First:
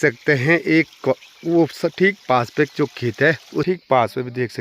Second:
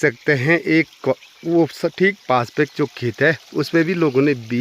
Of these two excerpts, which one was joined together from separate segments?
first; 1 cut; at 3.7 s

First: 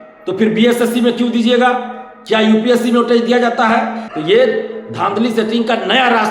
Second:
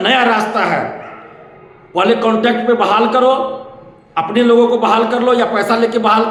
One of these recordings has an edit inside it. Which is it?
first; 1 cut; at 4.1 s

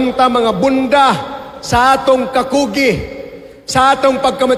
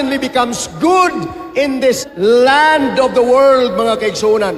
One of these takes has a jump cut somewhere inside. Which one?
second; 1 cut; at 2.0 s

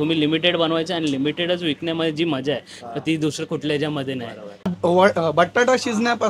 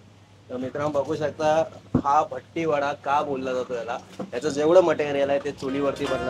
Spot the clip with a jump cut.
first; 1 cut; at 4.7 s

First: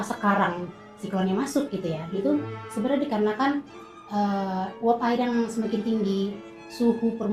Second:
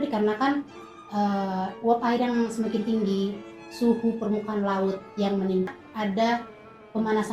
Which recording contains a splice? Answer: second; 1 cut; at 5.7 s

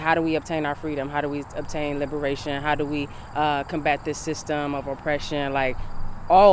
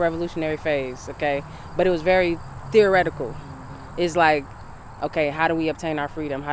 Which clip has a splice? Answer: second; 1 cut; at 2.5 s

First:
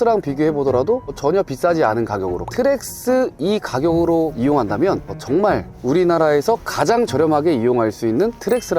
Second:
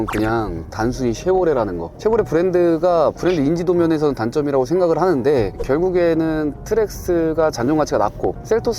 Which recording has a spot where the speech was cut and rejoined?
second; 1 cut; at 5.6 s

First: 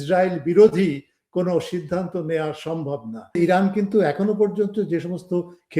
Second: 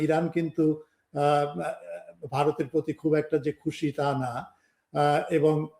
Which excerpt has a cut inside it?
first; 1 cut; at 3.4 s

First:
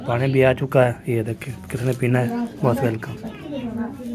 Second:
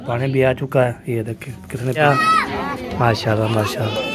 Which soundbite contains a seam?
second; 1 cut; at 2.0 s

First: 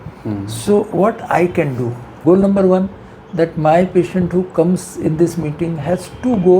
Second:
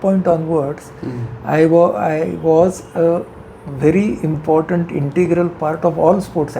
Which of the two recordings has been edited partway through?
first; 1 cut; at 2.1 s

